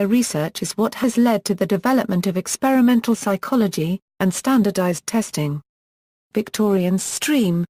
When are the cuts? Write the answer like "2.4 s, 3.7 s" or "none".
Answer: 5.1 s